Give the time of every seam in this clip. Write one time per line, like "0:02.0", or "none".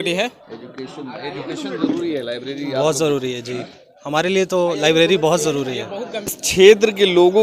0:06.4